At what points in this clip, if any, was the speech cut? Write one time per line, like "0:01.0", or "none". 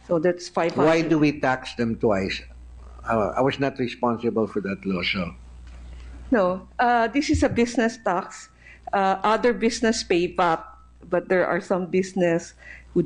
0:03.0